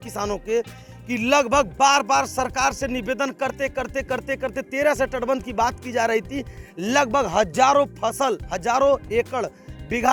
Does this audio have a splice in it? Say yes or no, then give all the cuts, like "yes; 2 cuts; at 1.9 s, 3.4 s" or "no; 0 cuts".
no; 0 cuts